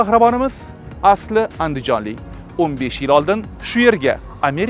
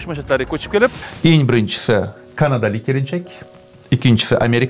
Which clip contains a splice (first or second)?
second